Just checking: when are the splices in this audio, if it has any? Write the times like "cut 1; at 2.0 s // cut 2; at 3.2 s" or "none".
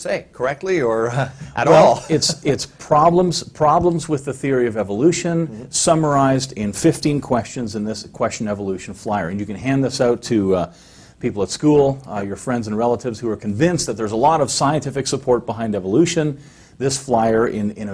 cut 1; at 5.2 s